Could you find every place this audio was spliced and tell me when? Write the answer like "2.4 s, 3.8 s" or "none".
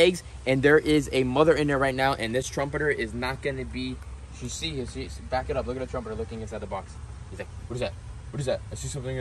none